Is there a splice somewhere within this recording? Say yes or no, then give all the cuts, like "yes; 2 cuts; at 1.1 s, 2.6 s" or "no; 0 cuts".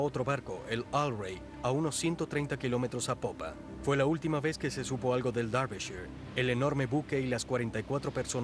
yes; 1 cut; at 1.1 s